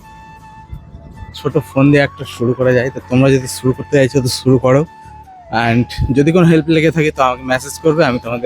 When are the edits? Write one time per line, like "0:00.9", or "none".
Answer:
0:01.2